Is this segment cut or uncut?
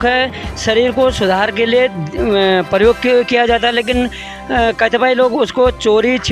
uncut